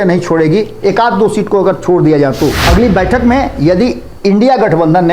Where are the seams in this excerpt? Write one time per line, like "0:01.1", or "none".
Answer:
0:02.6